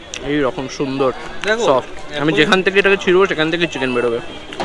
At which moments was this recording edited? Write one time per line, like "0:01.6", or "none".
none